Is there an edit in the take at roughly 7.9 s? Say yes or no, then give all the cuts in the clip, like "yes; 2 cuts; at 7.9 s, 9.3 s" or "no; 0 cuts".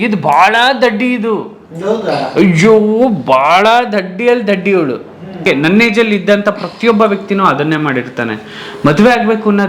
no; 1 cut; at 5.4 s